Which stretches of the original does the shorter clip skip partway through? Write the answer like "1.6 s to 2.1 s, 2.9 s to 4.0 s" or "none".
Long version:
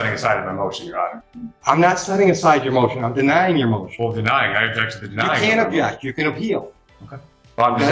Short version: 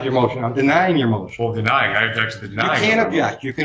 none